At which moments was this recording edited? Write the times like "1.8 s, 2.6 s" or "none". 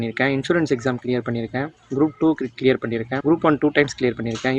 3.1 s

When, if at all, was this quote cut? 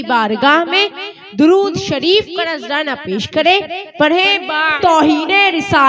4.8 s

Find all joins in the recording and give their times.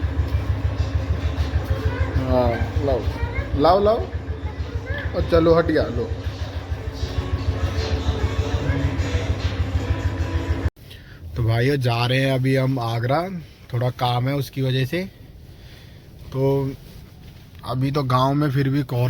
none

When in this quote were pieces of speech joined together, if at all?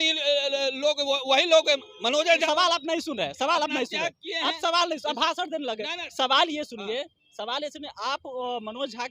2.4 s

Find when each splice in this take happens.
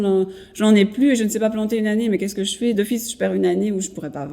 2.8 s

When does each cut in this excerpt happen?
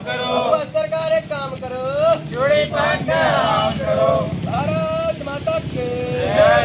none

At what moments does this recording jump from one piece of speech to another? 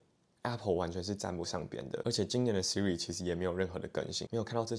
none

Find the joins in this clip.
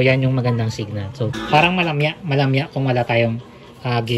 1.4 s

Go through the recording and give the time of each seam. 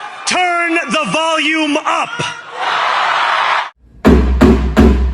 3.6 s

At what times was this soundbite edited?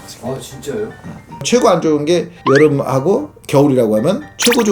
1.4 s

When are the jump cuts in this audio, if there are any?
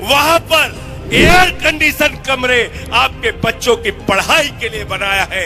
none

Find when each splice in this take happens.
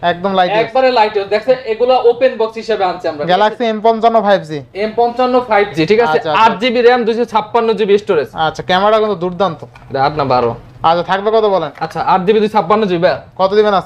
none

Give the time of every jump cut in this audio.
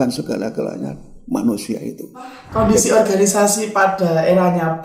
2.4 s

